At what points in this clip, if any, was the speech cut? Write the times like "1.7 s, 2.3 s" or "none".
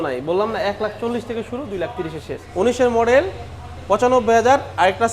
2.5 s

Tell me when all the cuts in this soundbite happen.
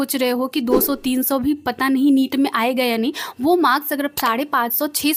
none

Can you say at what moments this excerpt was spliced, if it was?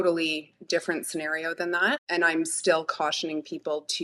2.1 s

